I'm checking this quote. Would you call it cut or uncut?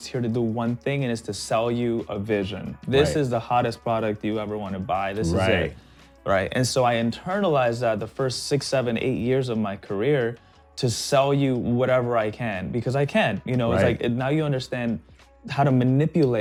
uncut